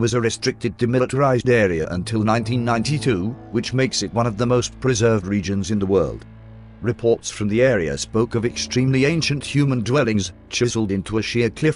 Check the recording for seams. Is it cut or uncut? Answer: cut